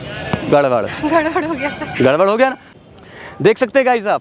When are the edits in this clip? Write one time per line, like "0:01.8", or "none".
0:02.7